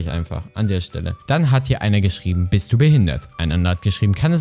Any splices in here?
yes; 1 cut; at 1.1 s

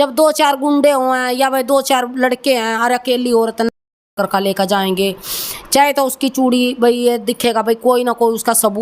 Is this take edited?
no; 0 cuts

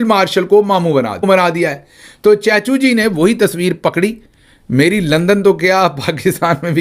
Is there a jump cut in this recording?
yes; 1 cut; at 1.2 s

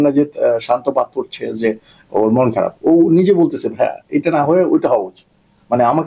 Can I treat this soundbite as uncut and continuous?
yes; 0 cuts

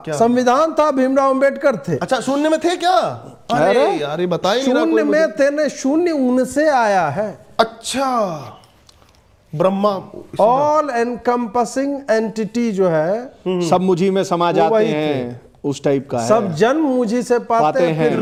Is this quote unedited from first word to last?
yes; 0 cuts

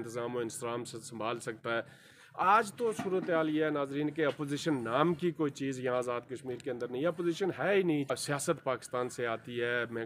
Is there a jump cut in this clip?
yes; 2 cuts; at 2.2 s, 8.1 s

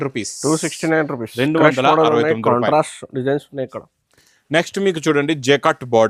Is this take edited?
no; 0 cuts

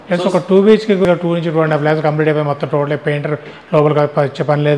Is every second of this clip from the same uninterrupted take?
no; 1 cut; at 1.0 s

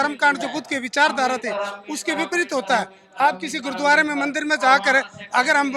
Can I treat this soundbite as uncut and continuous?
yes; 0 cuts

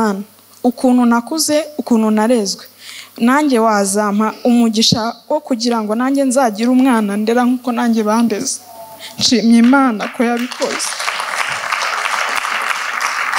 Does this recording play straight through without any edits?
yes; 0 cuts

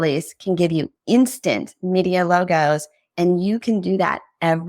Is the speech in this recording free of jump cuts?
no; 1 cut; at 0.9 s

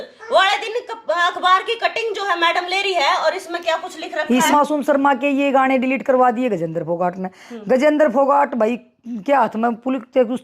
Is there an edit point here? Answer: yes; 1 cut; at 4.5 s

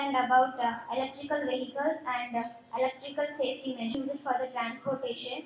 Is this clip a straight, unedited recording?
no; 1 cut; at 3.9 s

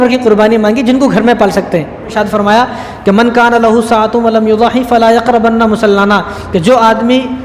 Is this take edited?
yes; 1 cut; at 2.1 s

